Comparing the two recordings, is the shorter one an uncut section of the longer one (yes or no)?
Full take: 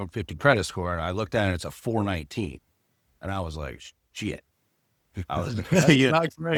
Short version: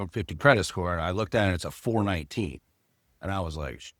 yes